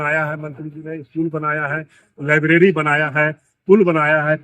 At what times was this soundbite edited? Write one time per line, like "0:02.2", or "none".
none